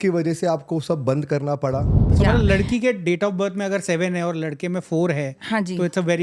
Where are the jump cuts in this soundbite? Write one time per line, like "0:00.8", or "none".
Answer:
0:02.0